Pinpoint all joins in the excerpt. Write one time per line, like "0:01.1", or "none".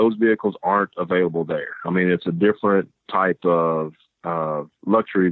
none